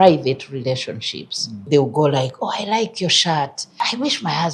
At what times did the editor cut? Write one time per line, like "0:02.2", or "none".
0:01.7
0:03.6